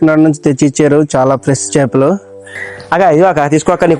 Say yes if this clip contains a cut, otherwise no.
yes